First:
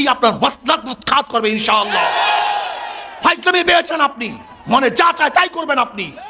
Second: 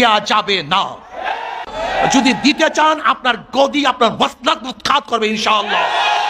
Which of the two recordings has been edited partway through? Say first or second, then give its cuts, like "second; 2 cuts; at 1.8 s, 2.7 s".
second; 1 cut; at 1.7 s